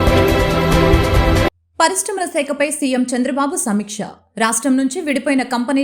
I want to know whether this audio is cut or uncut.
cut